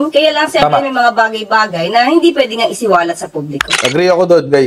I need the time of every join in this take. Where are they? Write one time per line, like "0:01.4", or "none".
0:03.7